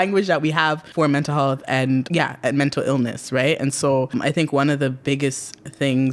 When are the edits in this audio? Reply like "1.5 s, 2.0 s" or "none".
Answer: 0.8 s, 2.1 s, 4.1 s